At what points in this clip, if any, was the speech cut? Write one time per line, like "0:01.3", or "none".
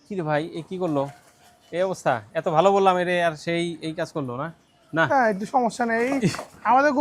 none